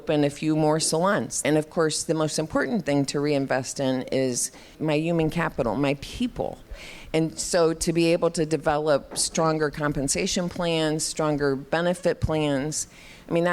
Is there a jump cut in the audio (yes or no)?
yes